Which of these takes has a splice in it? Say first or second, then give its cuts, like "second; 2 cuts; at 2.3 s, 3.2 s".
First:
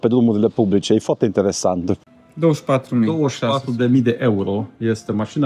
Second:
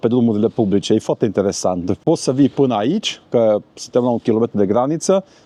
first; 1 cut; at 2.0 s